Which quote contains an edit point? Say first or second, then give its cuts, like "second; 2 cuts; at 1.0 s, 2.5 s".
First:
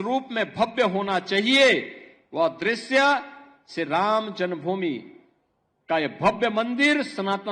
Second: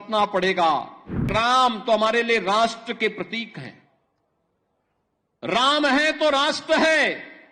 second; 1 cut; at 1.3 s